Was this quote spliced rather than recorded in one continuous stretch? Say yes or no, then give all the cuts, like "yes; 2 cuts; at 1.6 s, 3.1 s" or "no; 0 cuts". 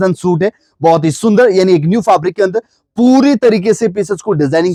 no; 0 cuts